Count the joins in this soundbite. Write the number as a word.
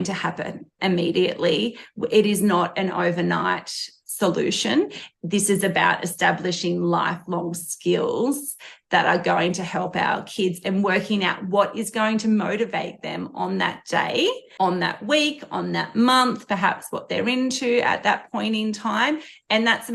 one